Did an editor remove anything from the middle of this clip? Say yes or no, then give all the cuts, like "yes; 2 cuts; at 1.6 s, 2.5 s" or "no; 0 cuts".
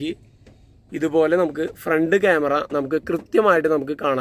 no; 0 cuts